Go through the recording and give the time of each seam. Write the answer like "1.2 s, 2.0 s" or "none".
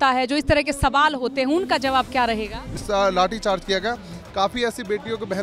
2.8 s